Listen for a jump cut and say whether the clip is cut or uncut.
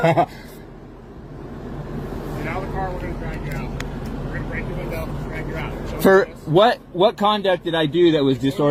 uncut